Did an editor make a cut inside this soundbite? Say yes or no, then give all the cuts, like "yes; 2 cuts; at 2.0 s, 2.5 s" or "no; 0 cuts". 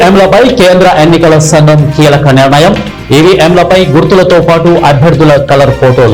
no; 0 cuts